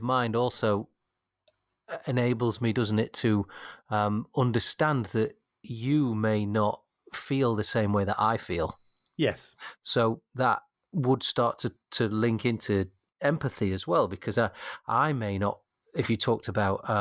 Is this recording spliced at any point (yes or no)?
no